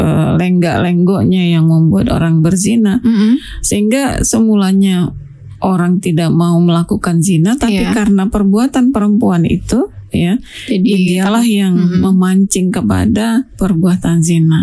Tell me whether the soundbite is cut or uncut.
uncut